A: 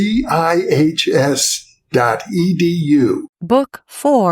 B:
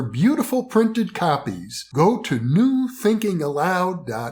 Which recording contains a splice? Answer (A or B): A